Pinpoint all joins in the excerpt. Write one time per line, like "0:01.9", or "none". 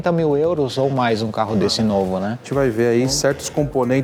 0:02.4